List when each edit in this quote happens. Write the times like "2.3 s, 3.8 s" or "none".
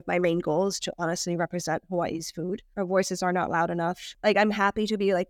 2.7 s, 4.1 s